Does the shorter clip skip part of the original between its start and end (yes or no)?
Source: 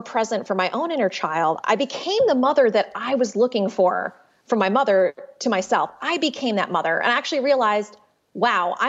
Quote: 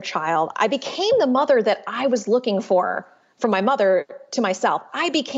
no